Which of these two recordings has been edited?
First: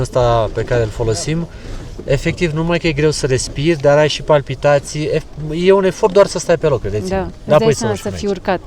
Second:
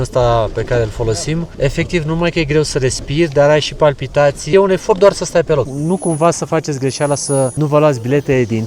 second; 4 cuts; at 1.5 s, 4.4 s, 5.7 s, 7.5 s

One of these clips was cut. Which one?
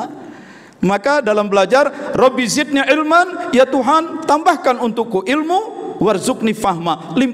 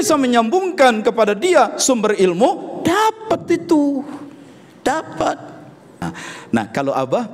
second; 1 cut; at 6.0 s

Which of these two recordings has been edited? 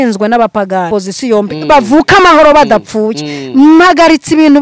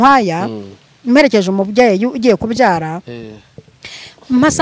first; 1 cut; at 0.9 s

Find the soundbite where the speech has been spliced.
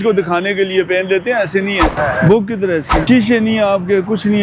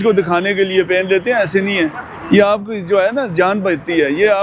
first; 2 cuts; at 1.9 s, 3.0 s

